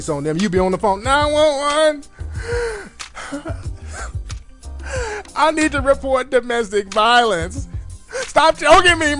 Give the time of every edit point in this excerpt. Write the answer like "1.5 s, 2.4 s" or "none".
4.0 s